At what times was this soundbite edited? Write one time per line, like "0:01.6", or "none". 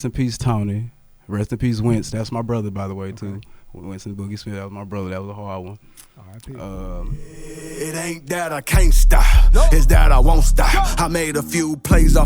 0:07.3